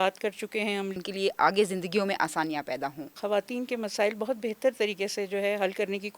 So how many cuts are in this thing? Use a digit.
2